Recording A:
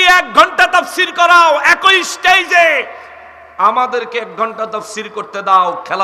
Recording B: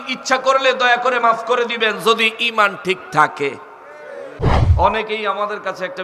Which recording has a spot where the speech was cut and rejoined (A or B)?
B